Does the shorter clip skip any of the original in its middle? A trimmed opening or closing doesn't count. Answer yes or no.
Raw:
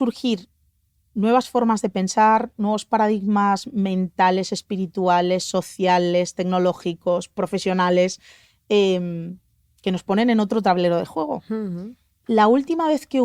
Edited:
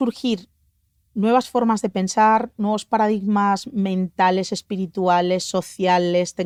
no